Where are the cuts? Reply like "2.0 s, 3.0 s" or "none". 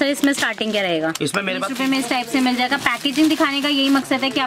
1.7 s